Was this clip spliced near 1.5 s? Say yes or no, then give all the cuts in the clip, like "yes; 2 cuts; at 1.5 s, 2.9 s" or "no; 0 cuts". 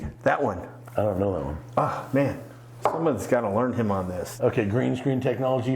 no; 1 cut; at 4.2 s